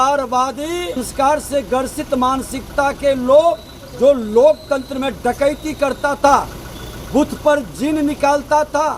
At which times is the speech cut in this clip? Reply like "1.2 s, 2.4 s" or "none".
1.0 s